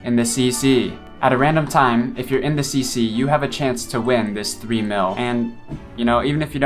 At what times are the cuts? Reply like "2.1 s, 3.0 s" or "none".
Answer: 1.0 s